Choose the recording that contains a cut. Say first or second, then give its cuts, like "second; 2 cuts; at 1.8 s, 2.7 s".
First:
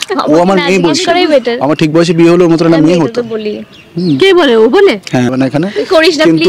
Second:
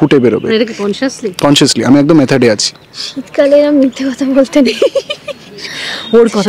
first; 1 cut; at 5.3 s